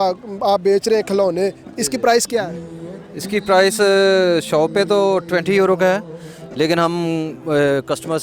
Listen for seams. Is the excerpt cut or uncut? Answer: uncut